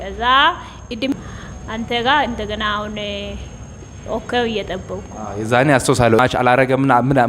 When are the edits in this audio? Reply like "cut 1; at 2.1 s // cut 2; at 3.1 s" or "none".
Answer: cut 1; at 1.1 s // cut 2; at 6.2 s